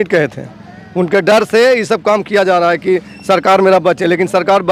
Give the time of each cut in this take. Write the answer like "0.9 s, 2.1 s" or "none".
none